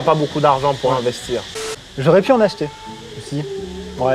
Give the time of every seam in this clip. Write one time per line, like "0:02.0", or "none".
0:01.5

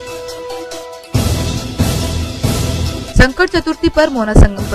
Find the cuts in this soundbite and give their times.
0:00.9

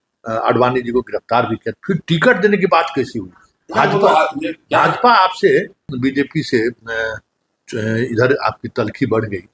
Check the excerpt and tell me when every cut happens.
0:05.9

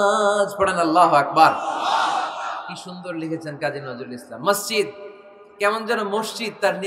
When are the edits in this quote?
none

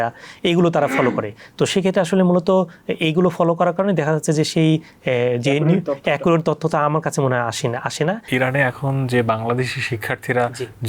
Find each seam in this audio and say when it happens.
0:08.3

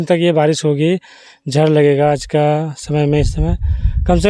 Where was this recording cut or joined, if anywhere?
none

